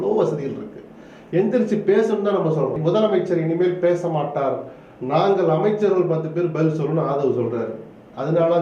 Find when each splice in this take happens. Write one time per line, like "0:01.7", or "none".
0:02.8